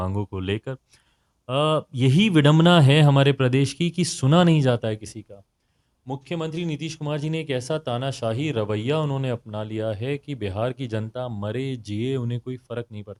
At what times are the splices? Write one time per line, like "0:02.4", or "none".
none